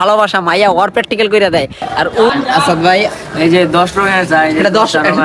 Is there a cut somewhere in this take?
yes; 1 cut; at 2.3 s

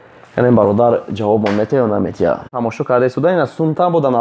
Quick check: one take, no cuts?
no; 1 cut; at 2.5 s

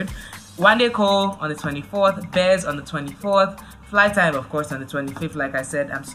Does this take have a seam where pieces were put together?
no; 0 cuts

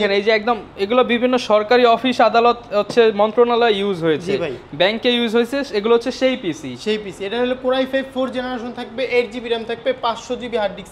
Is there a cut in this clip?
no; 0 cuts

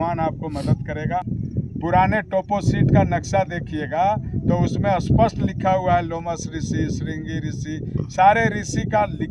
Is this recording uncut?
no; 1 cut; at 1.2 s

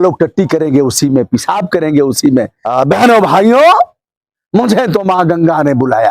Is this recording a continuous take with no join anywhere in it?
no; 1 cut; at 2.6 s

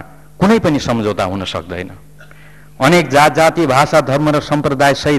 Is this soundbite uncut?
yes; 0 cuts

